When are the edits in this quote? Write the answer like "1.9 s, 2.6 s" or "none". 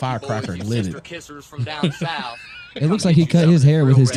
none